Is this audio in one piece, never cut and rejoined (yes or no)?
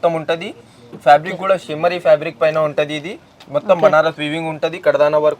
yes